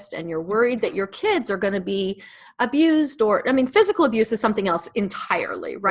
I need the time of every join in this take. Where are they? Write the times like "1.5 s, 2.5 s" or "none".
none

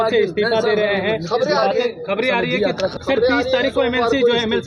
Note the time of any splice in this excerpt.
3.0 s

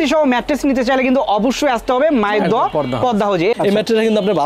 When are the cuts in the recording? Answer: 3.5 s

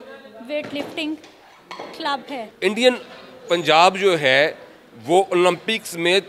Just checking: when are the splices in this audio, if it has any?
2.5 s

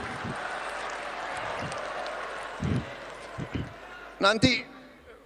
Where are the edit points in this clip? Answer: none

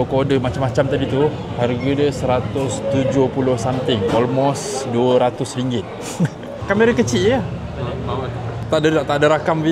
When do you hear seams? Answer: 6.6 s

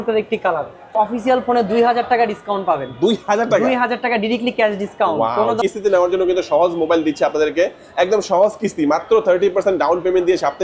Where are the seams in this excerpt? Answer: 0.9 s, 5.6 s

